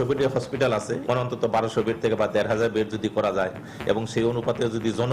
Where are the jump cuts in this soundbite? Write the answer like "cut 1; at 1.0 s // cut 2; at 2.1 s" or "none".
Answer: cut 1; at 1.0 s